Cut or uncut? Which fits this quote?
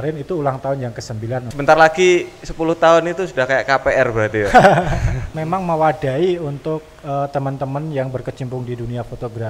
cut